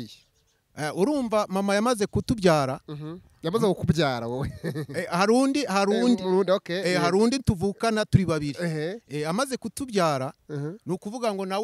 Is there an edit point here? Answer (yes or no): no